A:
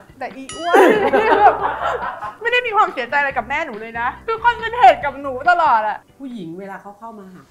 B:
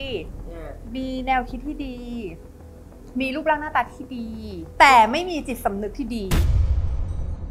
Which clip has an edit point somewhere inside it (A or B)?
A